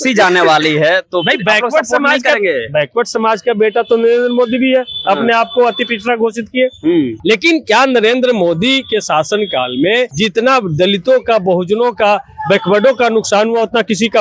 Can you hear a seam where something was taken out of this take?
yes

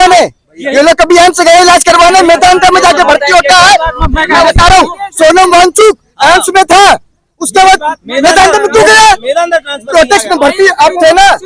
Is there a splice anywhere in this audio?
no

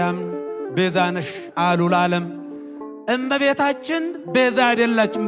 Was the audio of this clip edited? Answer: no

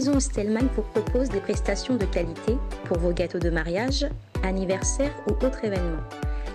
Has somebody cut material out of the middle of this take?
no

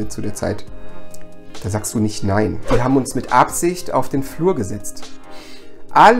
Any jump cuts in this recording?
yes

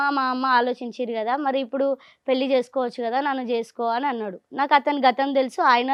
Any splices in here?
no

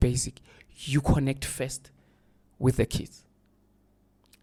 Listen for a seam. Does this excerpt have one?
no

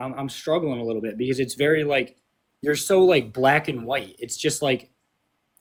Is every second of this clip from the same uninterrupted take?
yes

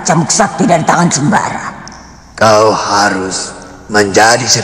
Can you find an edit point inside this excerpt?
no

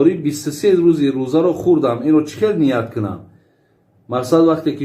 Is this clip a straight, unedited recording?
yes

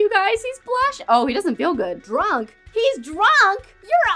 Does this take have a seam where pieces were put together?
no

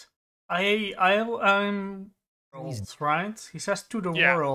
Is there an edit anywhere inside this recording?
yes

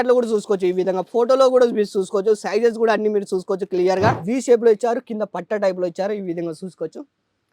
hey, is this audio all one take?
no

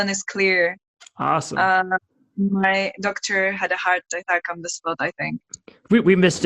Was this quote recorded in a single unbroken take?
yes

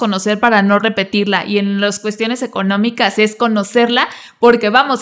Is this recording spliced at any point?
no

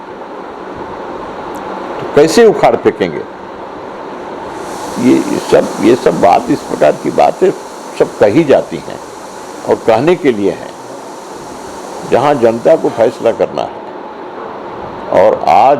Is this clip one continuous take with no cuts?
yes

